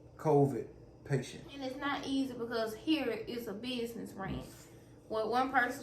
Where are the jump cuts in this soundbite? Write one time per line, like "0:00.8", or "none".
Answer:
0:01.7